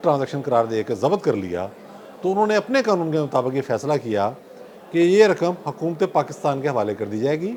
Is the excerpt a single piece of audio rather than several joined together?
yes; 0 cuts

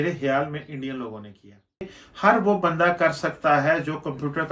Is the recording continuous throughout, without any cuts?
no; 1 cut; at 2.0 s

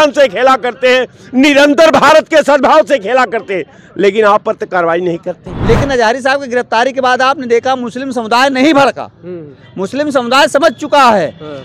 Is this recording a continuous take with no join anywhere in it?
no; 1 cut; at 5.5 s

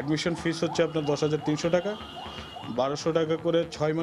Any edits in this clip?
no; 0 cuts

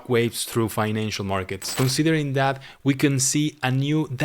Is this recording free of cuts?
no; 1 cut; at 1.6 s

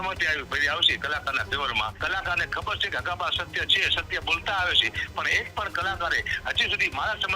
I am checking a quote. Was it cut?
yes; 1 cut; at 2.0 s

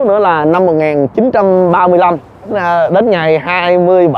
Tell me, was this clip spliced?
yes; 1 cut; at 2.6 s

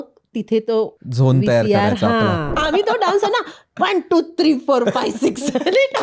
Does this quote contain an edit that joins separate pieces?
yes; 2 cuts; at 1.0 s, 2.5 s

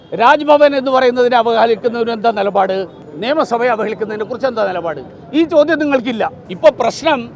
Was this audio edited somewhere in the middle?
yes; 2 cuts; at 3.0 s, 6.4 s

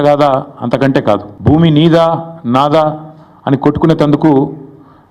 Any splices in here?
yes; 1 cut; at 1.3 s

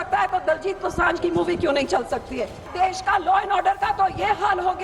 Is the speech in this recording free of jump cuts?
no; 1 cut; at 2.6 s

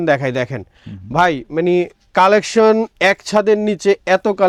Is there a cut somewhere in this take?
no; 0 cuts

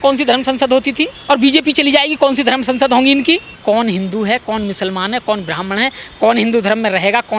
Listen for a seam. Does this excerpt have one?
yes; 2 cuts; at 1.1 s, 3.5 s

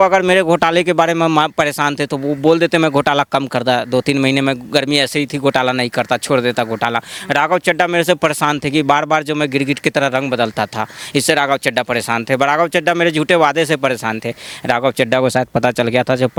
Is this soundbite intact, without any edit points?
yes; 0 cuts

